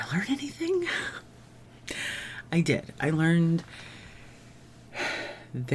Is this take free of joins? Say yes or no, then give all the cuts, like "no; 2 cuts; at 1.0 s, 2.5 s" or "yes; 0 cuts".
yes; 0 cuts